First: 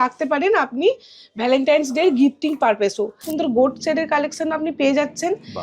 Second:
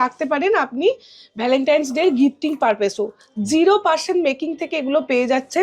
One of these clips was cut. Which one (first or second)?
first